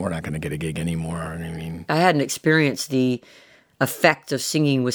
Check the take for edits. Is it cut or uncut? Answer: cut